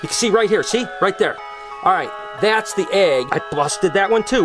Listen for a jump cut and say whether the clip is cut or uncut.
cut